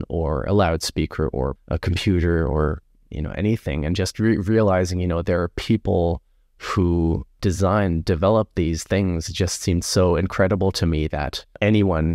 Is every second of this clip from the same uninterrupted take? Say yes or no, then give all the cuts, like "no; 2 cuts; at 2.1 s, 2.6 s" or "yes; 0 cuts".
no; 1 cut; at 1.6 s